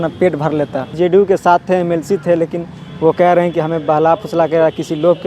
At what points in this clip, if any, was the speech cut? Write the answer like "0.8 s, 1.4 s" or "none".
1.0 s